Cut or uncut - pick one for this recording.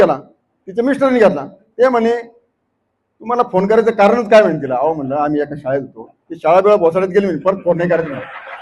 cut